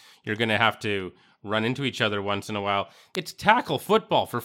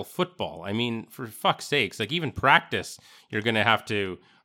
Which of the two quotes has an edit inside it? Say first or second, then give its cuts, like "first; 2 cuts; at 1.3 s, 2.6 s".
first; 1 cut; at 3.1 s